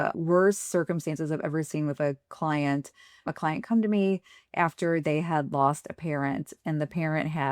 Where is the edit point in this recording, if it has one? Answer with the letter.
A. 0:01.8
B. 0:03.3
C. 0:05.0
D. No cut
B